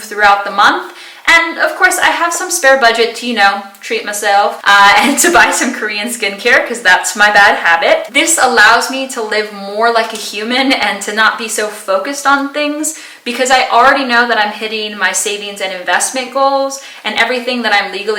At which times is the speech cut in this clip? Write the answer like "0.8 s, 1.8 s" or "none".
none